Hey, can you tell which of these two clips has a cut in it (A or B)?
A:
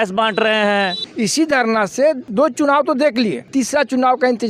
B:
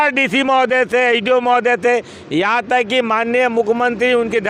A